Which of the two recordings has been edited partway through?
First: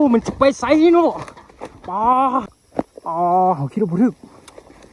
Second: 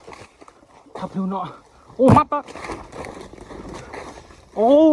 first; 1 cut; at 2.6 s

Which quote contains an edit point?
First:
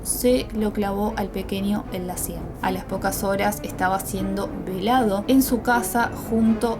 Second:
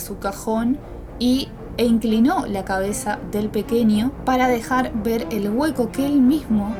first; 2 cuts; at 2.4 s, 5.2 s

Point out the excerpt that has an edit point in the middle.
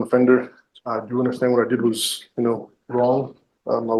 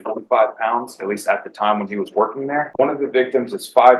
second; 1 cut; at 2.7 s

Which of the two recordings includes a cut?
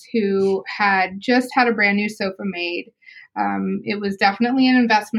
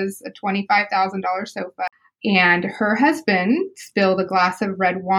second; 1 cut; at 1.9 s

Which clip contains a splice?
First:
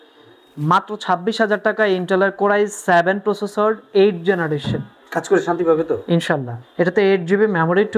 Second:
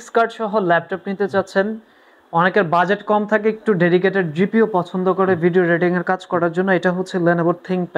first; 1 cut; at 6.6 s

